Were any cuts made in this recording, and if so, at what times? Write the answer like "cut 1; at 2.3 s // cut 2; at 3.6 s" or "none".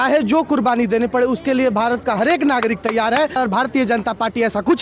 cut 1; at 3.3 s